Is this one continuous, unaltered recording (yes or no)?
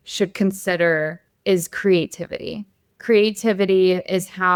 yes